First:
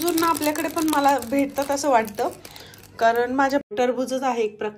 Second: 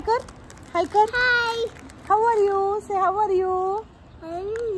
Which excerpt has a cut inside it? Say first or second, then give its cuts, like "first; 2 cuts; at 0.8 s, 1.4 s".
first; 1 cut; at 3.7 s